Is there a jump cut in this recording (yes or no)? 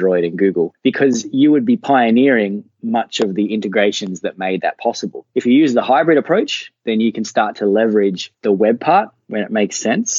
yes